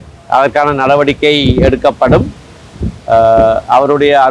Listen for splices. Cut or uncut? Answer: uncut